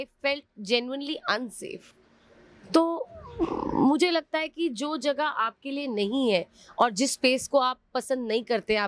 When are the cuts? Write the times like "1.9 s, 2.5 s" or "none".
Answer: none